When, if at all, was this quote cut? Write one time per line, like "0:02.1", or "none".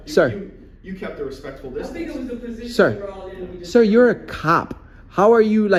none